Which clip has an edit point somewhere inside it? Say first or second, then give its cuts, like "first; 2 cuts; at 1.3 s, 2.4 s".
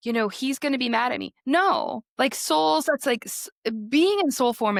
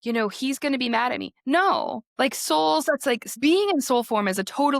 second; 1 cut; at 3.3 s